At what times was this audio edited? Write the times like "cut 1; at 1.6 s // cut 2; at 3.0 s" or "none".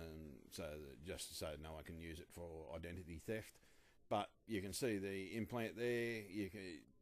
cut 1; at 3.2 s